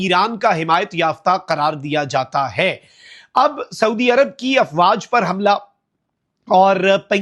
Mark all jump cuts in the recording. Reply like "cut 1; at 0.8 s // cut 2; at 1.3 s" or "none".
none